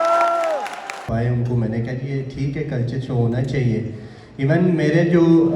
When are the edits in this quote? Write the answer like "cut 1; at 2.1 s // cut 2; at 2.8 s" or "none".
cut 1; at 1.1 s